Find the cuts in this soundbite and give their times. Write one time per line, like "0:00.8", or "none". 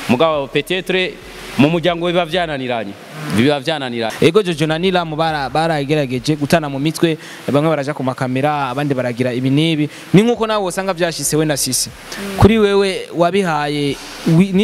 0:04.1